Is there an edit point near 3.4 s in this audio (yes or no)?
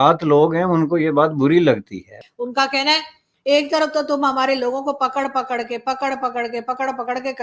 no